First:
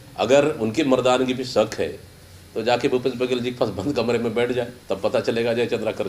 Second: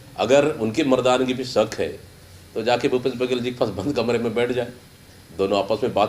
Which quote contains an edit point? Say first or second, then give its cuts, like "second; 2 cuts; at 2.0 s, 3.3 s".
first; 1 cut; at 4.8 s